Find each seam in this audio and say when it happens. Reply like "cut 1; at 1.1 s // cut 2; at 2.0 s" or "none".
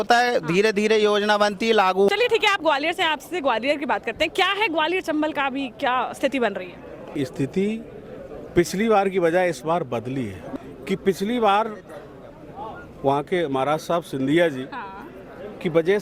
cut 1; at 2.1 s // cut 2; at 7.2 s // cut 3; at 10.5 s